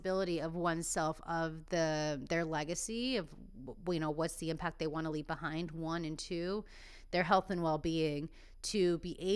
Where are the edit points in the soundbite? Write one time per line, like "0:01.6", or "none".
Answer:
none